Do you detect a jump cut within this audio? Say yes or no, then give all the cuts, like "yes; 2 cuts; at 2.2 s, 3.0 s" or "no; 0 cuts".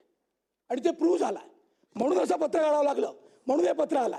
no; 0 cuts